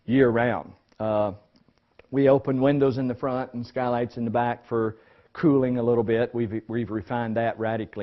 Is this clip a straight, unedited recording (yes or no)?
no